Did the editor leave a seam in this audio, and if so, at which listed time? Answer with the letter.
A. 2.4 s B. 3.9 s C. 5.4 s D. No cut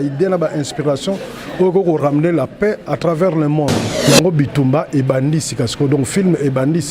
B